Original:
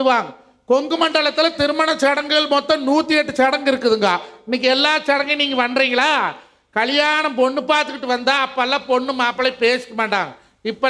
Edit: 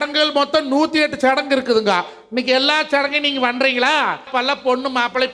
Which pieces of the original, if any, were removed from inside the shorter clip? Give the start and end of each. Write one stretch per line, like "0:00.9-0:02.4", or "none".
0:06.4-0:08.5